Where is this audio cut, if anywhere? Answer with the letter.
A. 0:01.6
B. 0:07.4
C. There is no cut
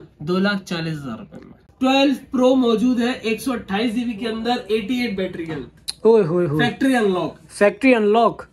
A